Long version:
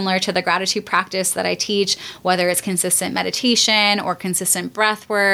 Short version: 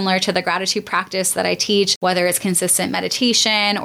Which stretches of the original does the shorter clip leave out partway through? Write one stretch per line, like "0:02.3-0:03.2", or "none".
0:01.9-0:02.2